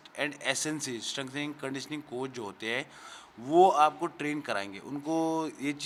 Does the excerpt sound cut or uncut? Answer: uncut